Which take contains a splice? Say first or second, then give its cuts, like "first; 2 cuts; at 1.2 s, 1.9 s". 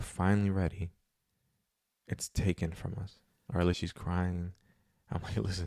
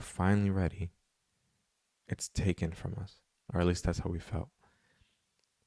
first; 1 cut; at 3.8 s